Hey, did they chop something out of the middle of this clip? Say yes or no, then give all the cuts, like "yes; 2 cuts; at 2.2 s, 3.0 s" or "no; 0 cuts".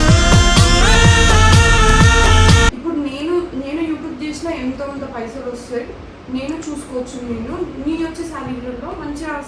yes; 1 cut; at 2.8 s